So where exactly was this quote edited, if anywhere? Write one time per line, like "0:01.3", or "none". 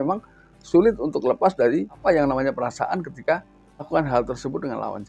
0:02.0
0:03.8